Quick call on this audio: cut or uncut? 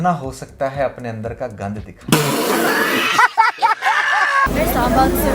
uncut